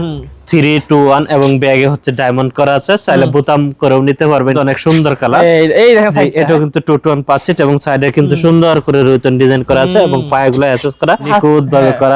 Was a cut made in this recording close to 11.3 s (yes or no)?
yes